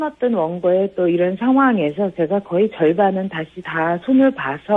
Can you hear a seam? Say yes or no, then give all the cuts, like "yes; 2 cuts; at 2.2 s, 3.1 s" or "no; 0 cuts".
no; 0 cuts